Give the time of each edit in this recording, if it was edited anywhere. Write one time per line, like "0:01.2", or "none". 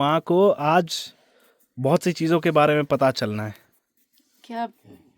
none